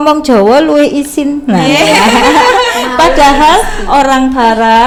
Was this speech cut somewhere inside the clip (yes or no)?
no